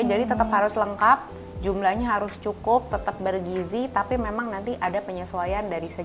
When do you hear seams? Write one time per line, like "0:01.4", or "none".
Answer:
none